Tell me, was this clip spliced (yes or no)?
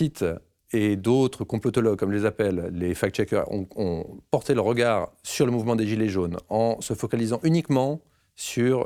no